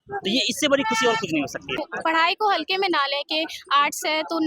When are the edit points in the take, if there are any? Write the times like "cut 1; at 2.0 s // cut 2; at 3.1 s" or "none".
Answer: cut 1; at 1.8 s